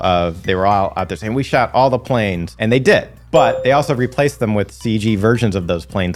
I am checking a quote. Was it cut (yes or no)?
no